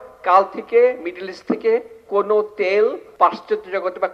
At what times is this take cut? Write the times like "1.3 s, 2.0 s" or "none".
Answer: 3.0 s